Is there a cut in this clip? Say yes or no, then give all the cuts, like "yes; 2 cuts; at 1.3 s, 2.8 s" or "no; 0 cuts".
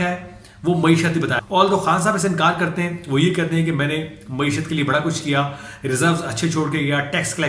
yes; 1 cut; at 1.4 s